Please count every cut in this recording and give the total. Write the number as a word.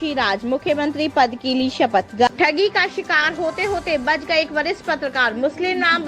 one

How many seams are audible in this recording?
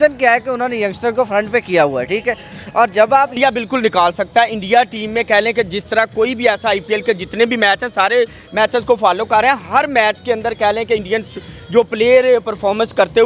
one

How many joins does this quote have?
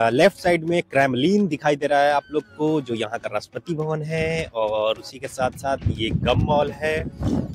zero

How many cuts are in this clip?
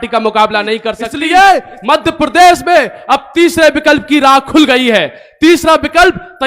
one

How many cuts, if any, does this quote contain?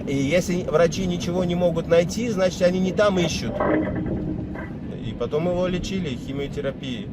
one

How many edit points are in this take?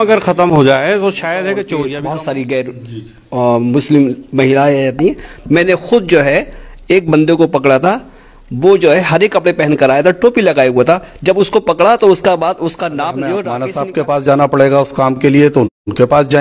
two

